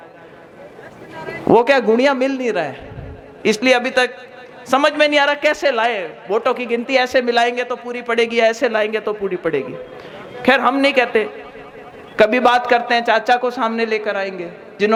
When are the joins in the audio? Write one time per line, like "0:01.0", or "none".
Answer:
none